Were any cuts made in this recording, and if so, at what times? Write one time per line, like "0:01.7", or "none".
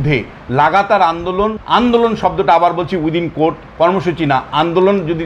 0:01.6